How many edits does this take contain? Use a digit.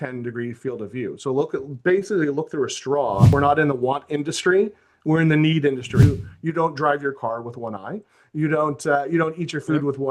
2